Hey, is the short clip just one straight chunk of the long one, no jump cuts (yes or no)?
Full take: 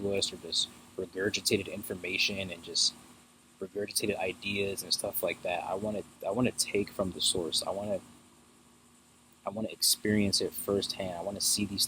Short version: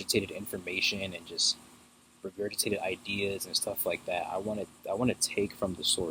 yes